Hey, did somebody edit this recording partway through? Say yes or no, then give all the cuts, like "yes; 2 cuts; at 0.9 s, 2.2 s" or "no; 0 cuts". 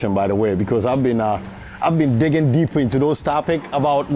no; 0 cuts